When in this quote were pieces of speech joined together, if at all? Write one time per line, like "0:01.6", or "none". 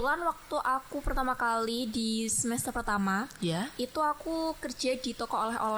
none

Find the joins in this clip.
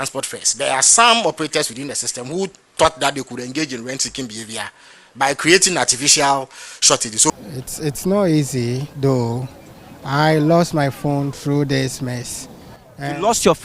0:07.3

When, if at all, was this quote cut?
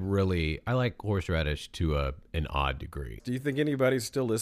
0:03.2

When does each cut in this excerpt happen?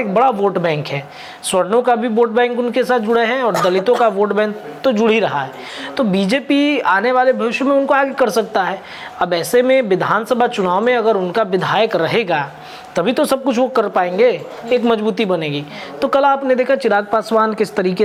none

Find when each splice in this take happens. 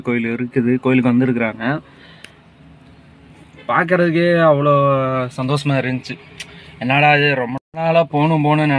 0:07.6

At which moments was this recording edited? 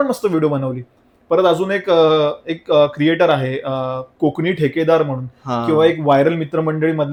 none

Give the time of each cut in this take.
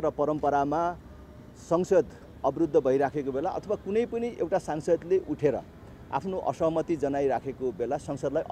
none

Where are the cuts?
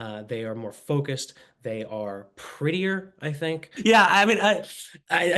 0:03.7

